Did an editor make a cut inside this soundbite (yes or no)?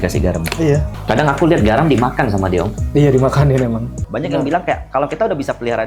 yes